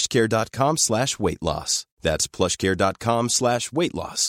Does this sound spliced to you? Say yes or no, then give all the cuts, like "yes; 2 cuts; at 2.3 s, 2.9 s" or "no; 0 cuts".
no; 0 cuts